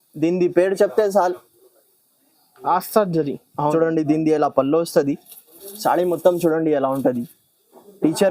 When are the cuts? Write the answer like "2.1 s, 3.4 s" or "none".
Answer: 3.5 s